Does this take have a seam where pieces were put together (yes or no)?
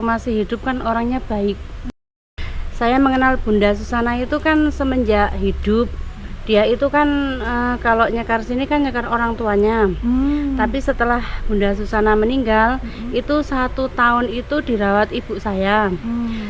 yes